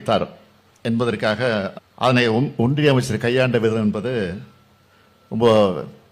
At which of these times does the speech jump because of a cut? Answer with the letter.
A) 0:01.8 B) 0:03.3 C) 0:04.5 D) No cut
A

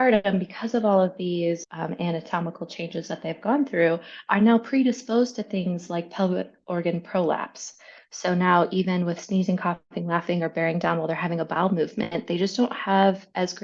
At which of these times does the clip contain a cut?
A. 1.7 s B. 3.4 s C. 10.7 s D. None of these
A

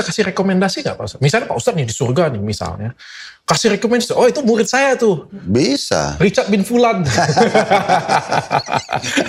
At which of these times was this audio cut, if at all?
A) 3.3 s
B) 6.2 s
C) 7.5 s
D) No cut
D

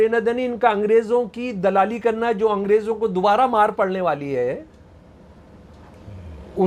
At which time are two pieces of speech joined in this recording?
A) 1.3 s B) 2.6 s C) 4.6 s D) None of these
D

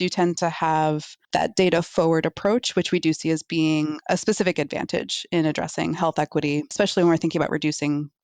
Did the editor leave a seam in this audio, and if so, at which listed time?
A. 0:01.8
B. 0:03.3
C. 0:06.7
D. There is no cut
C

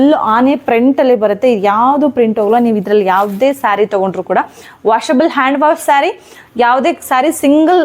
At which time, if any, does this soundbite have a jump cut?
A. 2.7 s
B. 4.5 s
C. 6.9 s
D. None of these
D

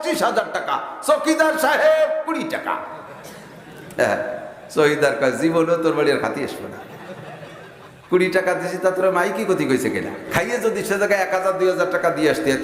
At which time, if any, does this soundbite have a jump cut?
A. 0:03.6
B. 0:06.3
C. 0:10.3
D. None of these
C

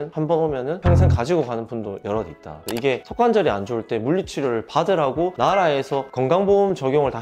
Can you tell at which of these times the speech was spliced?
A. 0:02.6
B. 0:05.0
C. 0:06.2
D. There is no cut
A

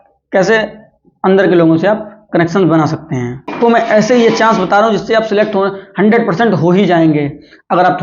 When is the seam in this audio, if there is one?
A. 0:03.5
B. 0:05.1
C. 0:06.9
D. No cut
A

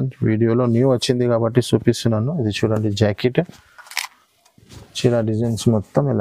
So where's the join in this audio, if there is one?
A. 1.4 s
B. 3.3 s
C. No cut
C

